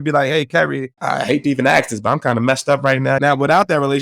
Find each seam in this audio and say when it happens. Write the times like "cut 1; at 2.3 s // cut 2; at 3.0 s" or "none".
cut 1; at 0.9 s // cut 2; at 3.2 s